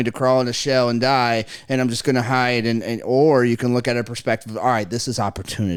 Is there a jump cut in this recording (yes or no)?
no